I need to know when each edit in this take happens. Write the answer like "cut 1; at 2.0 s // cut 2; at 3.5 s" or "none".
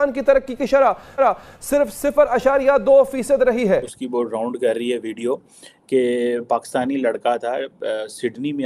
cut 1; at 3.9 s